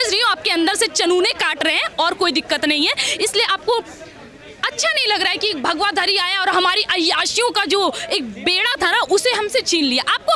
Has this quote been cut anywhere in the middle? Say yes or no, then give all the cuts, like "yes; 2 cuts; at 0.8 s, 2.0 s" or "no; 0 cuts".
no; 0 cuts